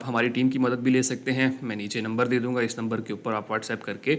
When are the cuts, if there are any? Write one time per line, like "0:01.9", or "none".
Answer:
none